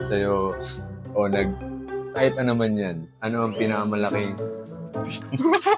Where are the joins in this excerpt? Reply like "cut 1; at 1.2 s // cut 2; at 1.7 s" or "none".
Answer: none